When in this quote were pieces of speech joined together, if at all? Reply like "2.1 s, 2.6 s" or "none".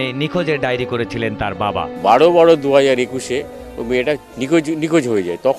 none